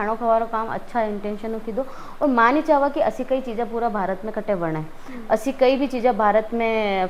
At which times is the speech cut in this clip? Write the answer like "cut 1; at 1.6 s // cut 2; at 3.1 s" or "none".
none

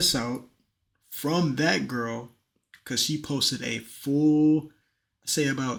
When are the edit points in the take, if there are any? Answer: none

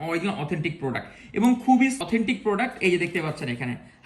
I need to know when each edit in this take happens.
cut 1; at 2.0 s

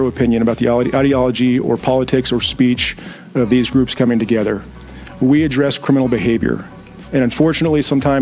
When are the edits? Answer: none

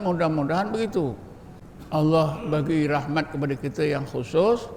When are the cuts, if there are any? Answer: none

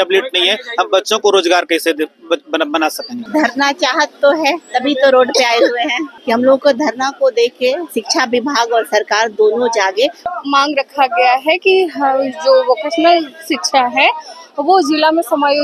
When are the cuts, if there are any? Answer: cut 1; at 3.2 s // cut 2; at 6.1 s // cut 3; at 10.2 s

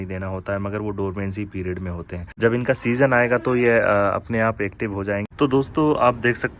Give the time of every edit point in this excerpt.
cut 1; at 2.2 s // cut 2; at 5.3 s

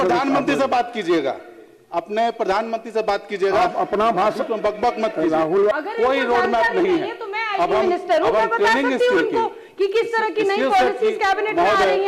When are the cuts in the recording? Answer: cut 1; at 5.7 s

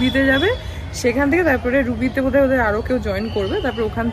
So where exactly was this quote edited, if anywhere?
none

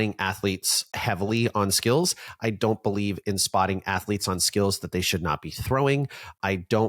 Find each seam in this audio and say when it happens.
none

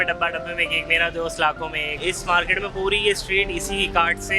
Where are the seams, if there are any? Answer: cut 1; at 2.0 s

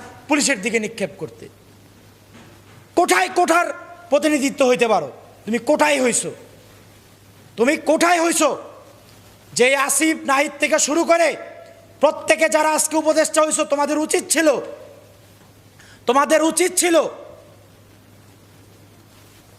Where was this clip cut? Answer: cut 1; at 2.9 s

